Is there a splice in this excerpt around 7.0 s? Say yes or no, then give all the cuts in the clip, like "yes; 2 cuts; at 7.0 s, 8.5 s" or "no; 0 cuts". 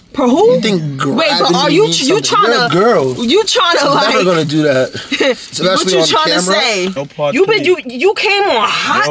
yes; 1 cut; at 7.0 s